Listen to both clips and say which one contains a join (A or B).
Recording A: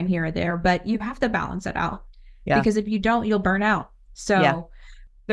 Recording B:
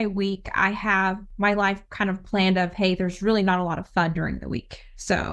B